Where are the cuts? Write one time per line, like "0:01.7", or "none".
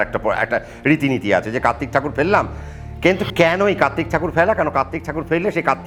none